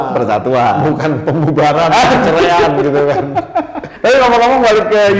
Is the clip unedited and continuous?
no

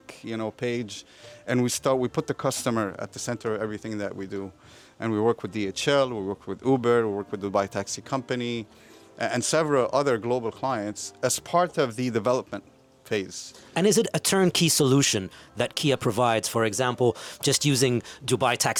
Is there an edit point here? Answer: no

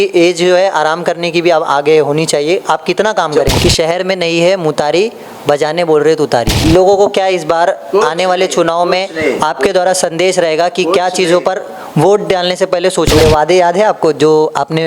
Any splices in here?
yes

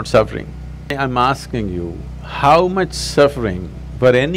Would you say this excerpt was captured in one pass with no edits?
no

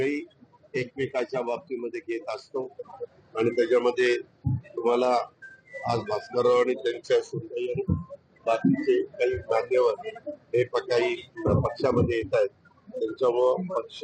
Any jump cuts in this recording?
yes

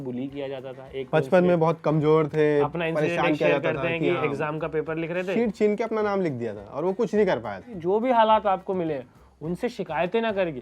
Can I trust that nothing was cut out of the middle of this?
no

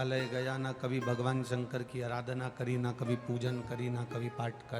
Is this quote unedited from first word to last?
yes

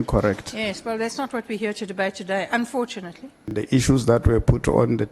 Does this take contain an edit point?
yes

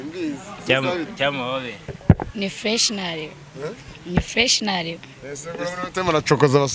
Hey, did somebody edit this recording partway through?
no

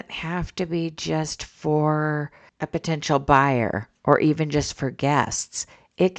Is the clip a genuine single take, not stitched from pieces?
yes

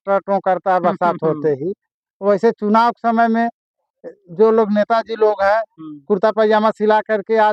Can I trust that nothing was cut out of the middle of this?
yes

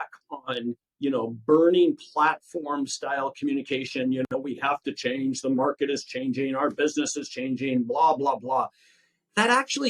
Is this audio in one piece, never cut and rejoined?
yes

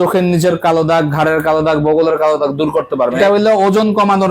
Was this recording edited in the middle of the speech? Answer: yes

